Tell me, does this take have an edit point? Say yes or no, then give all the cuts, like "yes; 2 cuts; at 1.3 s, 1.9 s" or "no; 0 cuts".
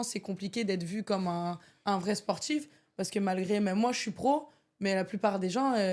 no; 0 cuts